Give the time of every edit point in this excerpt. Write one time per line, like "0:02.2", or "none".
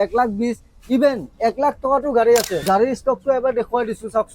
0:02.6